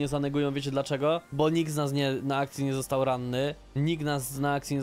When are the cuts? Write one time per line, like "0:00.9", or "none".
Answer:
none